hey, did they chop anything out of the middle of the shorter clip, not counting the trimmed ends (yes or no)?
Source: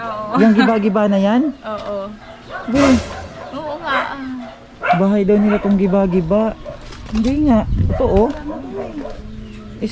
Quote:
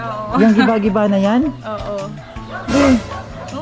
no